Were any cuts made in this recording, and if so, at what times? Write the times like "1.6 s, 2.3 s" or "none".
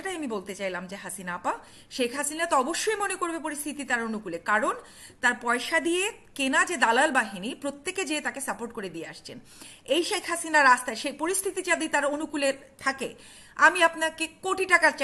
none